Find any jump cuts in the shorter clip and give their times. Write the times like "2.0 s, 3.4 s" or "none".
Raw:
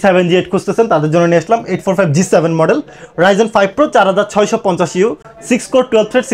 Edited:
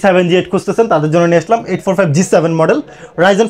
none